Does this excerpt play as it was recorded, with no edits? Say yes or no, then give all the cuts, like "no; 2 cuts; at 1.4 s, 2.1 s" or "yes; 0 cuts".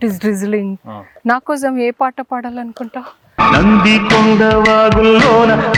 yes; 0 cuts